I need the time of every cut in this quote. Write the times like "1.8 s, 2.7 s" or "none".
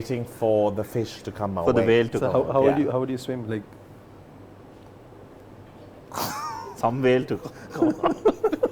none